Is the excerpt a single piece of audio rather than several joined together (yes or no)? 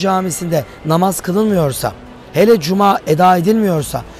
yes